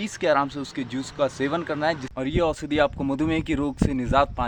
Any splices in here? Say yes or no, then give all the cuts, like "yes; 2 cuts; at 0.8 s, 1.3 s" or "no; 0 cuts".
no; 0 cuts